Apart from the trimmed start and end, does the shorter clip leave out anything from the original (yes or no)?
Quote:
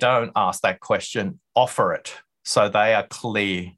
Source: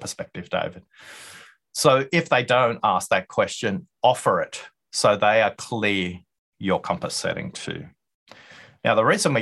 no